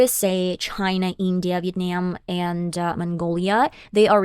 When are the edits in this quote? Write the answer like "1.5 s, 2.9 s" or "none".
none